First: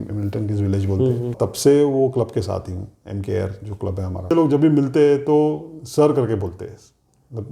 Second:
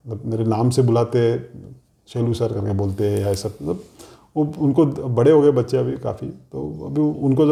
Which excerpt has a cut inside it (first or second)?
first